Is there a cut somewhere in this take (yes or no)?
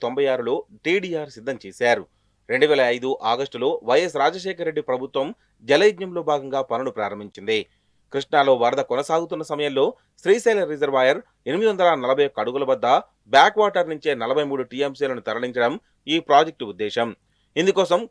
no